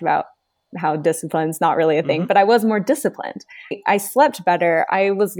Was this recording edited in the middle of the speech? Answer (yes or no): no